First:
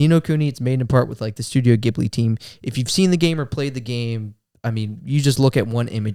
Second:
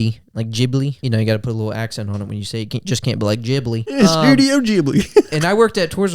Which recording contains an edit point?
second; 2 cuts; at 1.0 s, 4.0 s

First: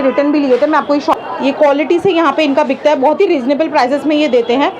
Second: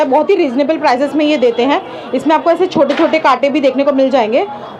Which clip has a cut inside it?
first; 1 cut; at 1.1 s

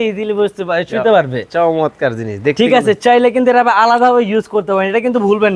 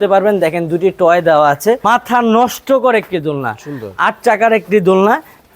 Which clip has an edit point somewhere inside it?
second; 1 cut; at 1.8 s

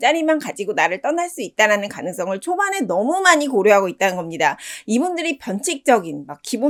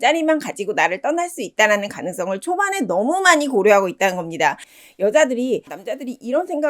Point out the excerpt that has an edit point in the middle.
second; 2 cuts; at 4.7 s, 5.7 s

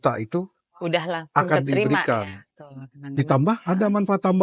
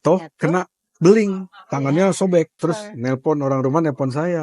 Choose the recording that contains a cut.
second; 1 cut; at 2.6 s

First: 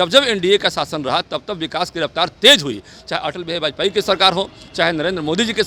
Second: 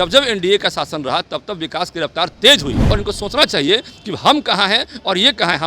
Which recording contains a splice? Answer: second; 1 cut; at 2.9 s

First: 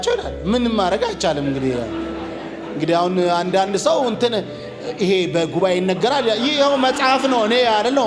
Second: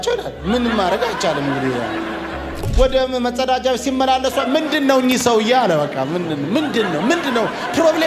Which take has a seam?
second; 1 cut; at 2.7 s

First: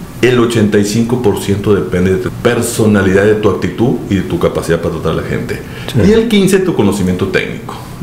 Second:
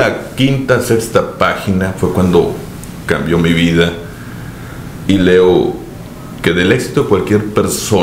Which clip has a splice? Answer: first; 1 cut; at 2.3 s

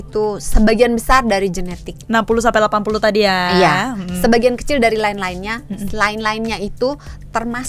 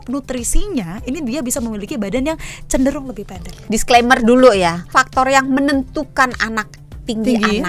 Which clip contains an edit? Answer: second; 2 cuts; at 3.5 s, 4.9 s

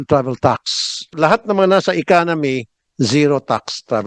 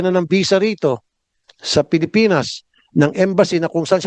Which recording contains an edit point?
first; 1 cut; at 1.1 s

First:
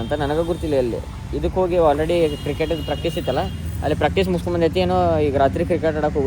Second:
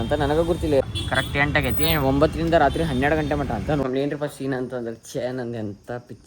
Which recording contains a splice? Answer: second; 2 cuts; at 0.8 s, 3.8 s

